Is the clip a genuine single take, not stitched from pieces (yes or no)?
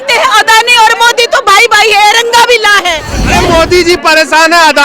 no